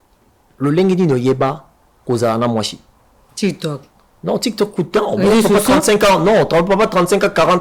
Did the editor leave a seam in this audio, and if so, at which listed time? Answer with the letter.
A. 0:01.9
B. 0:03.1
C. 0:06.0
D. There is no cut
D